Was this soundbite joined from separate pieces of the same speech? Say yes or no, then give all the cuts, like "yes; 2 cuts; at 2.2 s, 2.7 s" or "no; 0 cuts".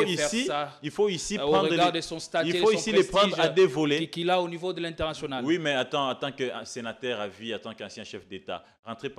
no; 0 cuts